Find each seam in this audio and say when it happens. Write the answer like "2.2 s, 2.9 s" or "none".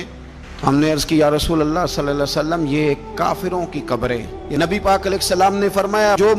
4.4 s